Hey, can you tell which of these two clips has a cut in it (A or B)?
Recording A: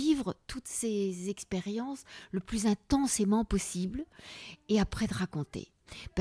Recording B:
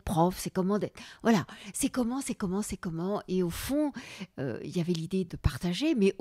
B